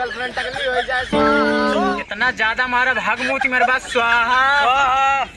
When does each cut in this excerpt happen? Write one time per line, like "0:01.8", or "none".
0:02.0